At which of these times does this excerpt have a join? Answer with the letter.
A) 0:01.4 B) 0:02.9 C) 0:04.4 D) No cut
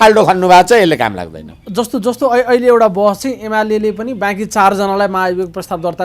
D